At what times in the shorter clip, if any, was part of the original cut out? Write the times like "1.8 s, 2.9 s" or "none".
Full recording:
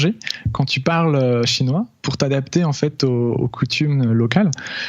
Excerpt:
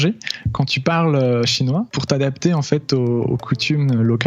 1.9 s